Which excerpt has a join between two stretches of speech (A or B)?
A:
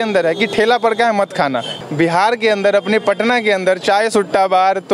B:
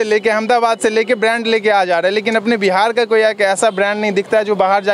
A